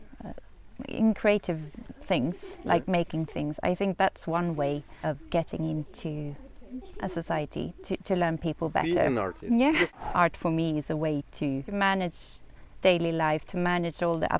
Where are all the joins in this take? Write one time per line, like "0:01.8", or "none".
0:09.9
0:11.7